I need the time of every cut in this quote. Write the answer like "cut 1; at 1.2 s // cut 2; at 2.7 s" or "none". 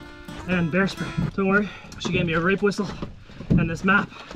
cut 1; at 1.3 s // cut 2; at 1.9 s